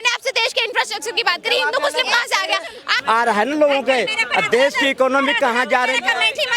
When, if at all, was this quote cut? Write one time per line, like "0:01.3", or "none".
0:03.0